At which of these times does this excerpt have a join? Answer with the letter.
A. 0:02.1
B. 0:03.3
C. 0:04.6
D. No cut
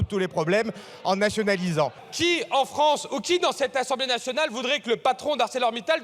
A